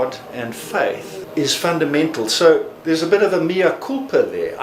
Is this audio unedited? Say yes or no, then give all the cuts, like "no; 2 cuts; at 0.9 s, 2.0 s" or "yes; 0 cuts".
no; 2 cuts; at 1.2 s, 2.7 s